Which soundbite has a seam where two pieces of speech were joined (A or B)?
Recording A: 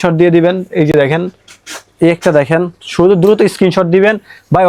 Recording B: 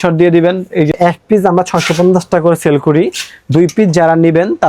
B